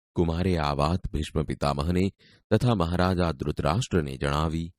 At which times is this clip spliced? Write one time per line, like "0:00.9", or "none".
0:03.0